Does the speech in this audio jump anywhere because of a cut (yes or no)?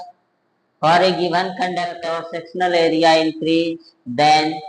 yes